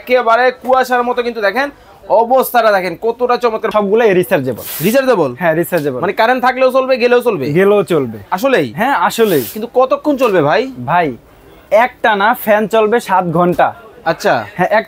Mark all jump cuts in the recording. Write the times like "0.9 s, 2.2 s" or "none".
3.7 s